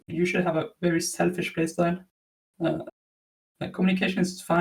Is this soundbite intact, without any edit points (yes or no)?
yes